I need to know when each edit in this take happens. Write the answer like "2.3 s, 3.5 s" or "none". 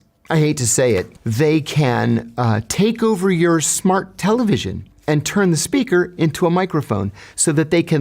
1.2 s

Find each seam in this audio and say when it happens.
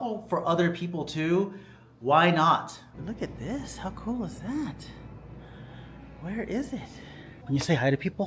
2.8 s, 7.3 s

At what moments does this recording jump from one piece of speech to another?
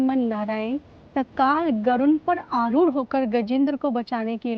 none

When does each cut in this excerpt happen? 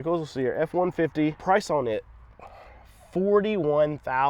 1.4 s

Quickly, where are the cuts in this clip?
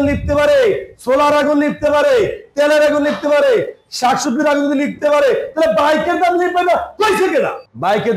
none

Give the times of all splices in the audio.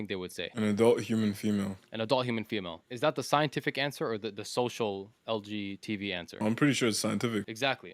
none

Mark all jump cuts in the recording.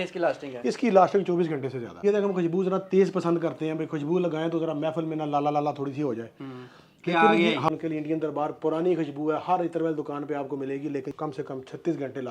2.0 s, 7.7 s, 11.1 s

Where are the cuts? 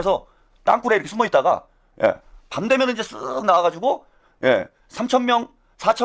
none

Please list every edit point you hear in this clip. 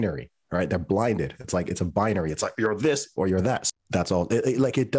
3.6 s

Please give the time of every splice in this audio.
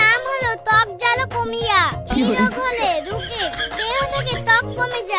none

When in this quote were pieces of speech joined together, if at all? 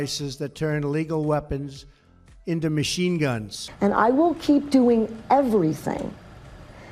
3.6 s

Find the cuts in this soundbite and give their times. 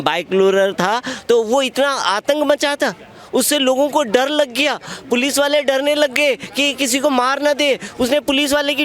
none

